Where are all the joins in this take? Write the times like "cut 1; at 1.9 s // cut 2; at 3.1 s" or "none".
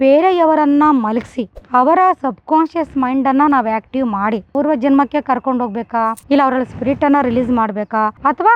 cut 1; at 4.6 s